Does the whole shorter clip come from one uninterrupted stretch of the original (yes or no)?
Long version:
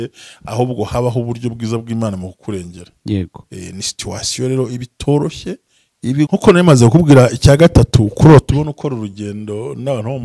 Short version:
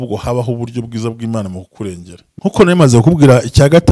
no